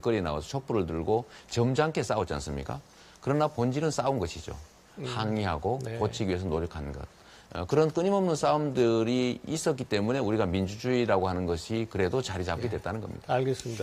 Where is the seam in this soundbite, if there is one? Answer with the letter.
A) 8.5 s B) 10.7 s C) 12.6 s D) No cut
B